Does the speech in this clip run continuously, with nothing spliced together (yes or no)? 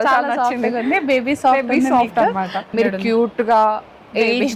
no